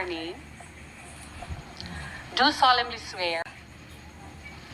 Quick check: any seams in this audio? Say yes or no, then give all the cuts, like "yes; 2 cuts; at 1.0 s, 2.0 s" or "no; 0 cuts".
yes; 1 cut; at 3.4 s